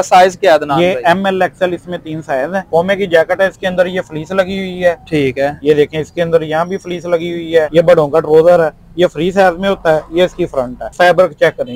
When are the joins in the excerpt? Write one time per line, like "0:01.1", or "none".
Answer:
0:02.6
0:07.7
0:10.8